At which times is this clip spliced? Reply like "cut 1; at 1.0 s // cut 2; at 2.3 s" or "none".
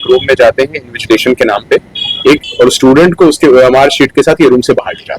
cut 1; at 2.5 s